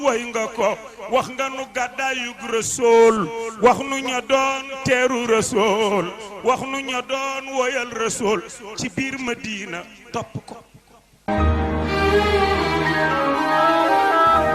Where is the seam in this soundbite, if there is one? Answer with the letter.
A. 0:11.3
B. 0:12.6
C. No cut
A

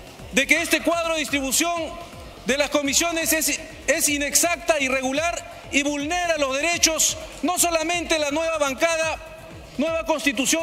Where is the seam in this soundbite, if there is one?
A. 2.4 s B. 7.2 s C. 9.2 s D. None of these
D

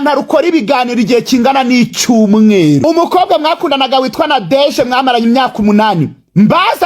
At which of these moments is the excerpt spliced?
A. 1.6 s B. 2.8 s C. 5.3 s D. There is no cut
B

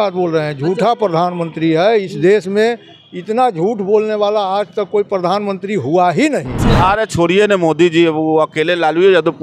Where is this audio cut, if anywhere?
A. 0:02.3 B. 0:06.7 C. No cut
B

